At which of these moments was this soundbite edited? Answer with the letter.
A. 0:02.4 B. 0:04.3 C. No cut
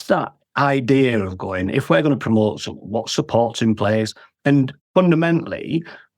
B